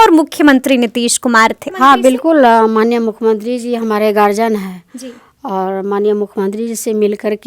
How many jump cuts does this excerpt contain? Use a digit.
1